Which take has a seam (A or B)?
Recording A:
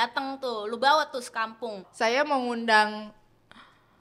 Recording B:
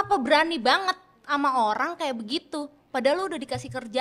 A